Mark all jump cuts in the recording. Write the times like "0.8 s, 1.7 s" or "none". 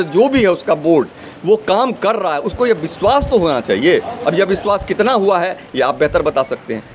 none